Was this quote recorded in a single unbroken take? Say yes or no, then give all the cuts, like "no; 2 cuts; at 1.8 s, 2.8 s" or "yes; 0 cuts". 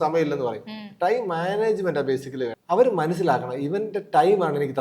no; 1 cut; at 2.6 s